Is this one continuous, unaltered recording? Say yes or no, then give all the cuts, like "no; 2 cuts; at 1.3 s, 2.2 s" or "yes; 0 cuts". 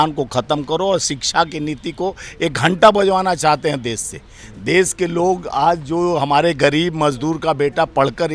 yes; 0 cuts